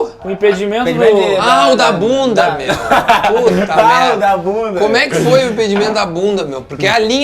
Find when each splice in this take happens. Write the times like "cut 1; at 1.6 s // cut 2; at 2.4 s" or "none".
none

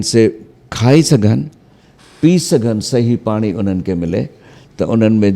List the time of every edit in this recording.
none

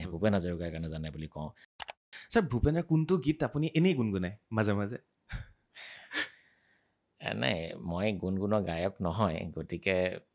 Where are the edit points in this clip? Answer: cut 1; at 1.8 s

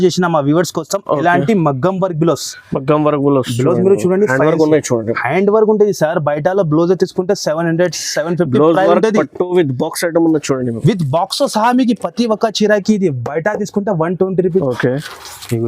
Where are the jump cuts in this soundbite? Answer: cut 1; at 14.6 s

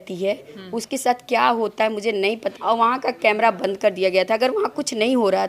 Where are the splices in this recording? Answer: cut 1; at 2.5 s

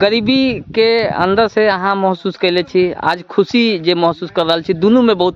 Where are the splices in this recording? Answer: none

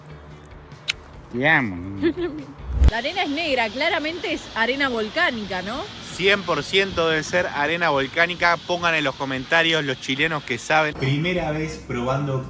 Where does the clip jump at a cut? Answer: cut 1; at 2.7 s // cut 2; at 10.9 s

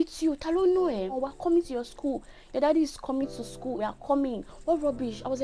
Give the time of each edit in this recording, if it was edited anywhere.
cut 1; at 1.2 s // cut 2; at 3.8 s

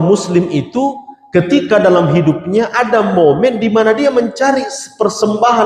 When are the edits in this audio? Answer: none

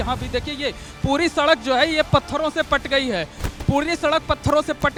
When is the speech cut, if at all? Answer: none

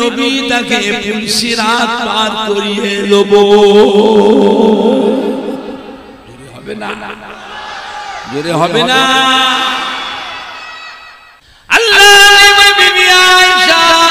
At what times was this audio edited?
cut 1; at 11.4 s

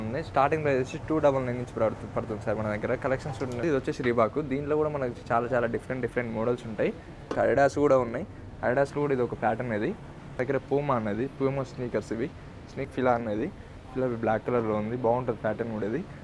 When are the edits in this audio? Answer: cut 1; at 3.6 s // cut 2; at 7.3 s // cut 3; at 10.4 s // cut 4; at 12.9 s

